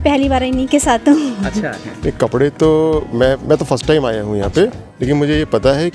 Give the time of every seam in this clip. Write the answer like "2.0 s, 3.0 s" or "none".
1.8 s